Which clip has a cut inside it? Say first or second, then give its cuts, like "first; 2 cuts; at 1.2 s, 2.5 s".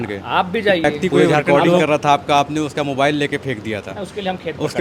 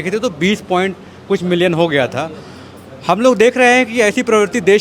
first; 1 cut; at 1.8 s